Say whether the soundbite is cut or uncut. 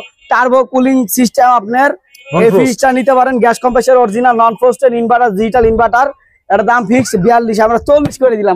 uncut